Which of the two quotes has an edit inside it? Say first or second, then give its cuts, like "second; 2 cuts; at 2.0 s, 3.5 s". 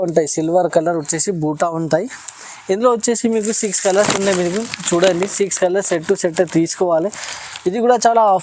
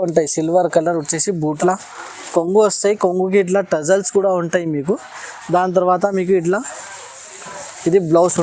second; 1 cut; at 1.6 s